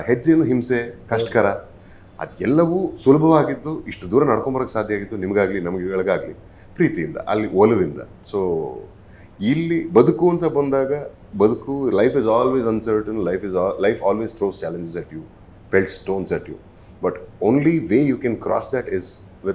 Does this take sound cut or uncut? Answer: uncut